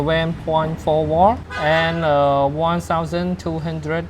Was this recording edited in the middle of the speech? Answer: yes; 1 cut; at 1.5 s

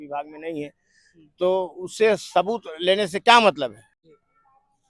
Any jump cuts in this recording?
yes; 1 cut; at 3.9 s

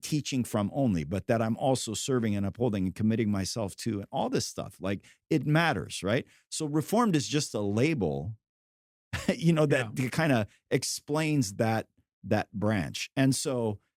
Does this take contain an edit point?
no; 0 cuts

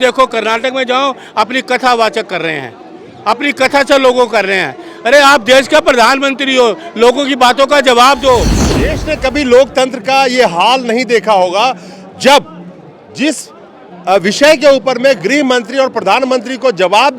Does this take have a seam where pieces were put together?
yes; 1 cut; at 8.6 s

